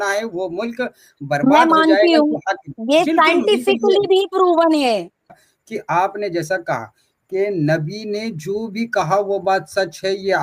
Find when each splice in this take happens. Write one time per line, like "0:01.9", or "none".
0:05.4